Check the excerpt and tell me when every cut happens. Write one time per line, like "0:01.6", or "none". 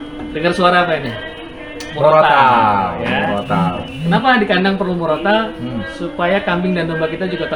none